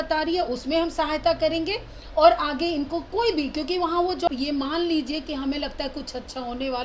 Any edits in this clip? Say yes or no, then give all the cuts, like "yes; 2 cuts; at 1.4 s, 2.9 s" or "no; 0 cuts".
yes; 1 cut; at 4.3 s